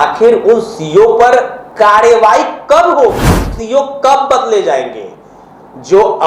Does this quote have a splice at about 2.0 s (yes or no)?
no